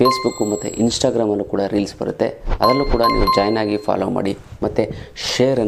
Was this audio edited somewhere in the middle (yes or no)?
no